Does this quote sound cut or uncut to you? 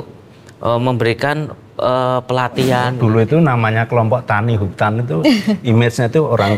cut